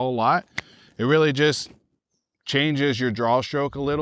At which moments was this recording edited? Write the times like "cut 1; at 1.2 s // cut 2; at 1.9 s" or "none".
none